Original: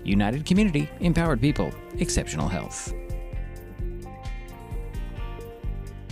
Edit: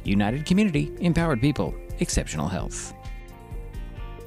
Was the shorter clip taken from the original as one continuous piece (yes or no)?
no